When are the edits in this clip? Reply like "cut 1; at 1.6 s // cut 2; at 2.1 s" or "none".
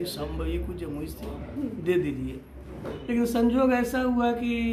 none